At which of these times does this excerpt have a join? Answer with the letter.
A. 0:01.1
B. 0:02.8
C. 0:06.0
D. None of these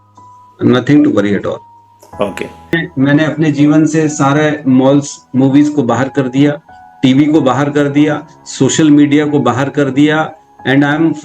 B